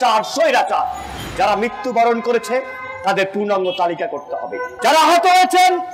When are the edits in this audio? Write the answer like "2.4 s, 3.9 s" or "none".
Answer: 1.2 s, 4.8 s